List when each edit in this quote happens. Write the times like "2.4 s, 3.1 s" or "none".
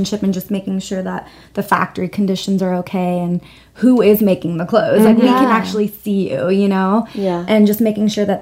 none

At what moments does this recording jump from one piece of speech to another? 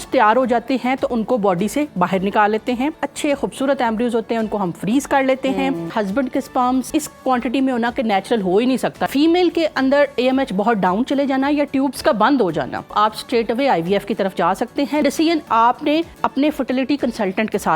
1.1 s, 3.0 s, 5.9 s, 6.9 s, 9.1 s, 12.9 s, 15.0 s, 16.1 s

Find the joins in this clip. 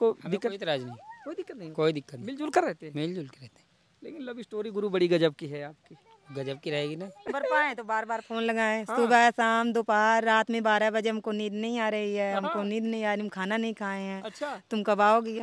7.3 s

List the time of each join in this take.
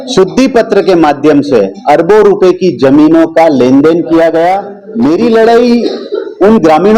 4.8 s

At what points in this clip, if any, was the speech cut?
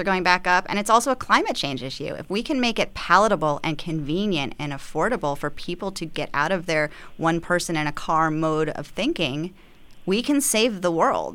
none

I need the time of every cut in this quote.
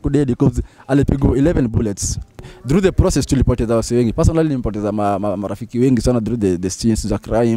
2.5 s

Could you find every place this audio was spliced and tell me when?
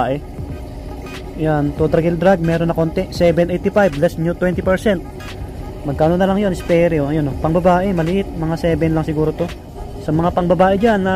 9.8 s

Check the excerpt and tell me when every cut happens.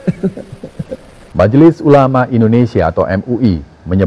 1.3 s

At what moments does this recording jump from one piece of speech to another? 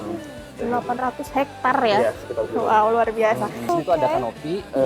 3.7 s

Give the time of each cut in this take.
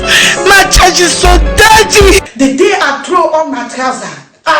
2.3 s

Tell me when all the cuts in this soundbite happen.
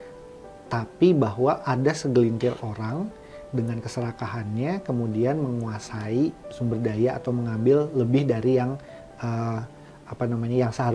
none

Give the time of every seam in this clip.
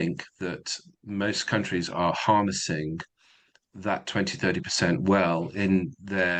none

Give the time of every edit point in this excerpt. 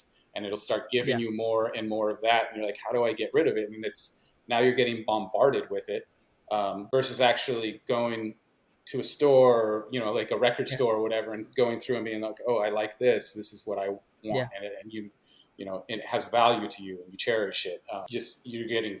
6.8 s, 18.1 s

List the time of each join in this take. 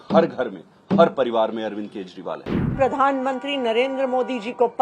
2.6 s

